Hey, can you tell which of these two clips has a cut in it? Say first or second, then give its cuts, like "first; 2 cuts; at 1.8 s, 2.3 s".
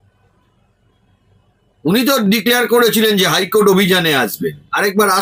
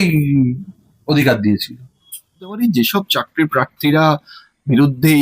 second; 1 cut; at 2.6 s